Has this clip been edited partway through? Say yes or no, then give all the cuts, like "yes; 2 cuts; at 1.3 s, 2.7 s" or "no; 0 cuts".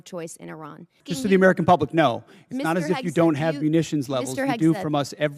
yes; 1 cut; at 1.0 s